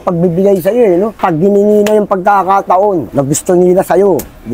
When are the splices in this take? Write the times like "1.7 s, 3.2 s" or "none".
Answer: 1.1 s